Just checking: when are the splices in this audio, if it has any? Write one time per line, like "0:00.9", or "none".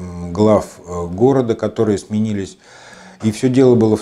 none